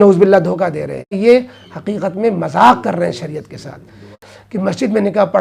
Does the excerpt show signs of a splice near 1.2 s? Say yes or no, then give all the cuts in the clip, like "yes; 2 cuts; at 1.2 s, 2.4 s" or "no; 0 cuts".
yes; 2 cuts; at 1.2 s, 4.3 s